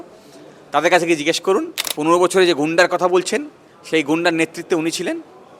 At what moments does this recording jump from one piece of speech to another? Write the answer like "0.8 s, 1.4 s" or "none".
1.8 s